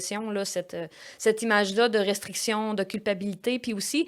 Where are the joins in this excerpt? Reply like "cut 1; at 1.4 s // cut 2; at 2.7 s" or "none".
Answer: none